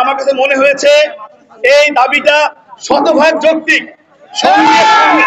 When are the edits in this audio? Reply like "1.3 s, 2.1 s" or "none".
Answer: none